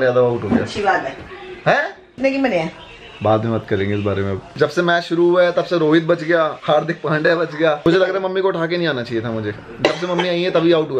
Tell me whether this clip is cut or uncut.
cut